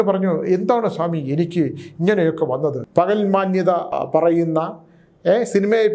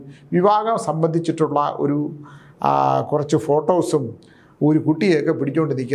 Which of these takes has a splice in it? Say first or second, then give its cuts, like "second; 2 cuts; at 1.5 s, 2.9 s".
first; 2 cuts; at 2.8 s, 3.9 s